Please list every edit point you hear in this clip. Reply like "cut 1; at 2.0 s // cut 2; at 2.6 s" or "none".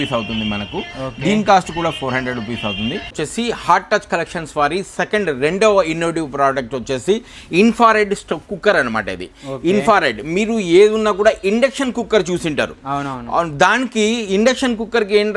cut 1; at 3.1 s